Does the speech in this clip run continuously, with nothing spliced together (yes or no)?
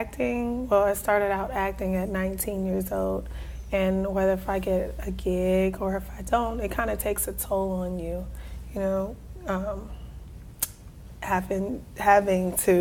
no